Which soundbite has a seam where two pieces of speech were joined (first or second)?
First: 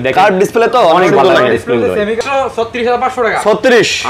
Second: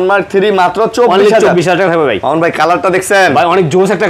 first